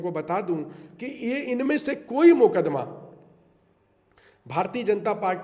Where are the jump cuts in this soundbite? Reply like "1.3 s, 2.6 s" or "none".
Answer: none